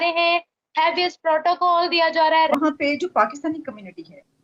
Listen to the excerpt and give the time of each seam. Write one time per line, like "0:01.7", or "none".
0:02.5